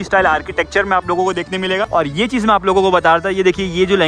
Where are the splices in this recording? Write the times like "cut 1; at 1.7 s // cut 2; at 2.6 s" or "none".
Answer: cut 1; at 1.9 s